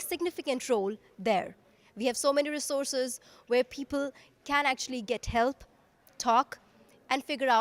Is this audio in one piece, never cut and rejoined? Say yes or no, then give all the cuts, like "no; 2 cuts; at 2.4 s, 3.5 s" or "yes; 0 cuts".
yes; 0 cuts